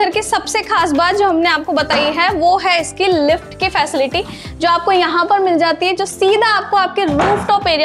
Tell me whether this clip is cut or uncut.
uncut